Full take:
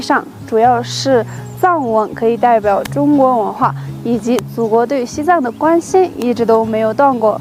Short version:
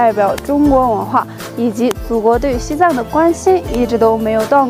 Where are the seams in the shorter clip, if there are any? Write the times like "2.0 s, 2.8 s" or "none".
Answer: none